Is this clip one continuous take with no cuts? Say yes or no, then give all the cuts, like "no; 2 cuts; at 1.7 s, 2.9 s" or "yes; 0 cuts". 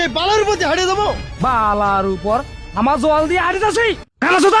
yes; 0 cuts